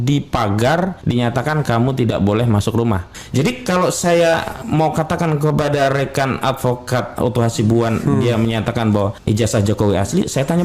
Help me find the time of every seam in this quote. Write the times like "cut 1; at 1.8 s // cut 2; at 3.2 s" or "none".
cut 1; at 1.0 s // cut 2; at 3.1 s // cut 3; at 9.2 s